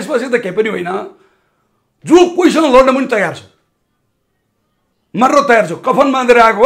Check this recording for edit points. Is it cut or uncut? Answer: uncut